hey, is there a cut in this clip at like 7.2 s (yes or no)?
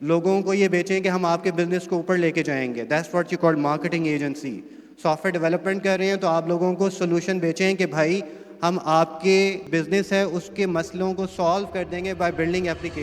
no